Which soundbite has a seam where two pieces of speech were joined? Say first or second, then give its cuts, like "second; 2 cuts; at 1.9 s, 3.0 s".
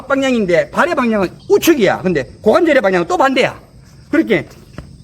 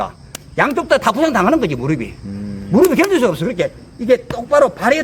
first; 1 cut; at 1.4 s